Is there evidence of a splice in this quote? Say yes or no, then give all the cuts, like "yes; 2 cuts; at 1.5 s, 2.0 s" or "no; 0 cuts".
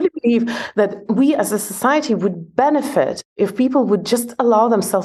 yes; 1 cut; at 1.0 s